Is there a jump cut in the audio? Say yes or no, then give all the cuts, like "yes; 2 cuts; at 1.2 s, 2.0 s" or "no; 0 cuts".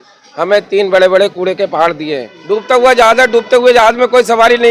yes; 1 cut; at 2.3 s